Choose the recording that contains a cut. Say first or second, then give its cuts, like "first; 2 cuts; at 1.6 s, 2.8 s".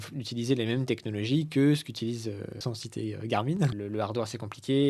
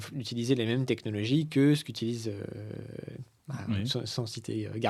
first; 2 cuts; at 2.6 s, 3.7 s